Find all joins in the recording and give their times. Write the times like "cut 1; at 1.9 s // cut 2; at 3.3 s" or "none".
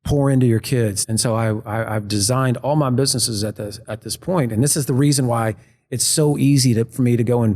cut 1; at 1.0 s